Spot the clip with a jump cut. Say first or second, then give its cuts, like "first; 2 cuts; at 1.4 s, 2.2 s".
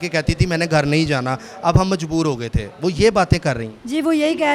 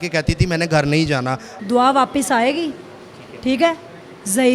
second; 1 cut; at 1.4 s